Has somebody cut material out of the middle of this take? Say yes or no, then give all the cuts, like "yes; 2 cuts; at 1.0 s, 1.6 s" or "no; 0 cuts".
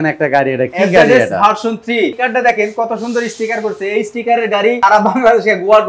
yes; 2 cuts; at 2.2 s, 4.8 s